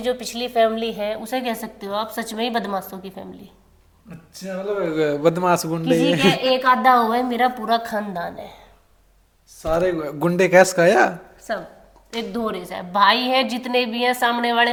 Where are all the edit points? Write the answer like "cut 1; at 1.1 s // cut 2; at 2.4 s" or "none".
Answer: none